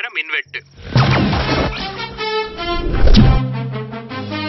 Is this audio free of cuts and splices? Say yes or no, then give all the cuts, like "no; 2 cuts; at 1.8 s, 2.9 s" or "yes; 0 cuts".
yes; 0 cuts